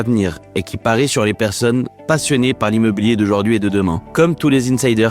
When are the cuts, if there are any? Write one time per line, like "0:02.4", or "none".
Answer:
0:04.0